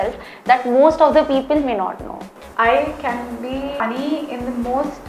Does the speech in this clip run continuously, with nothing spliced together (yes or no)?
no